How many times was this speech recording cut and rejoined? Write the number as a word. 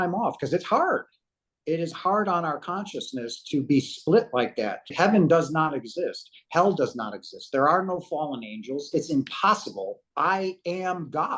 two